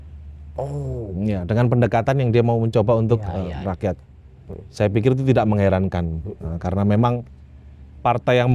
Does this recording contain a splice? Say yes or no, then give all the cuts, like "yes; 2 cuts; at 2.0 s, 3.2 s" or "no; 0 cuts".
no; 0 cuts